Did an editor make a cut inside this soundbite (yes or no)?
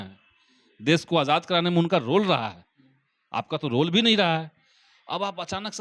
no